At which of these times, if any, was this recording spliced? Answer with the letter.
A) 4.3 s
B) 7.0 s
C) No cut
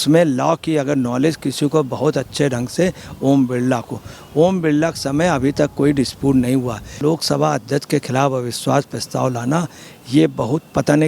B